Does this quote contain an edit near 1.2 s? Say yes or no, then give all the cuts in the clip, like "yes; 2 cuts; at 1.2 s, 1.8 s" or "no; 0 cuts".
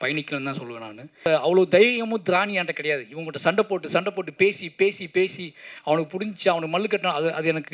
yes; 1 cut; at 1.2 s